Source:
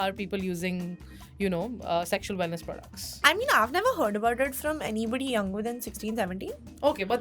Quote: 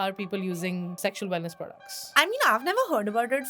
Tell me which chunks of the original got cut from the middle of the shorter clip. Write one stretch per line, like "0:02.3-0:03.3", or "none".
0:01.0-0:02.1